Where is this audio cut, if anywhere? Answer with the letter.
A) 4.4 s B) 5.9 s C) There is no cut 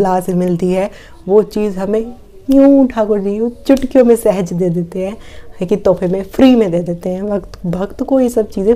C